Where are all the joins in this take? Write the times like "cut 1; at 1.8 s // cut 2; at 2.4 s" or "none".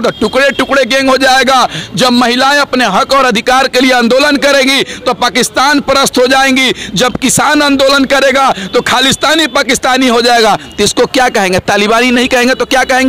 none